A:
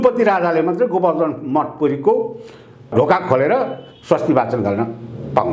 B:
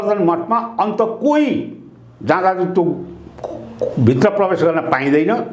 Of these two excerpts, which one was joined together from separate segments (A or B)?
A